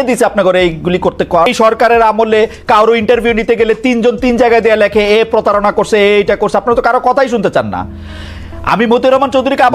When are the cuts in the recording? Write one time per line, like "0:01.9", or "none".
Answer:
0:01.5